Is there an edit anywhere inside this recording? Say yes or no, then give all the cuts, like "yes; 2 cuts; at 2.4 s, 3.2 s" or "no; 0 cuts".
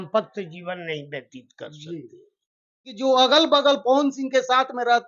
yes; 1 cut; at 2.9 s